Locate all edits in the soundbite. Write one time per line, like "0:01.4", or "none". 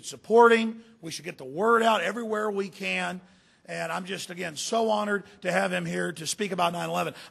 none